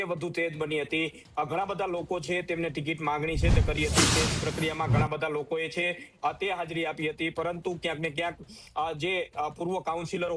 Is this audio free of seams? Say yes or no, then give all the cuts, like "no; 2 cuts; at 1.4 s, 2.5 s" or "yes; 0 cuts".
yes; 0 cuts